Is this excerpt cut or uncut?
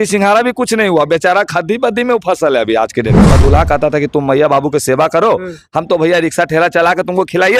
cut